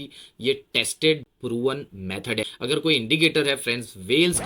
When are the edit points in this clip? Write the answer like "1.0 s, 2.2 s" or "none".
2.5 s